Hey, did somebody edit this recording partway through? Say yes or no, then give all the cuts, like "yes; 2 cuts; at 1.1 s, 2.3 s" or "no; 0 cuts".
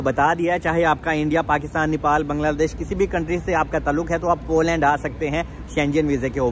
no; 0 cuts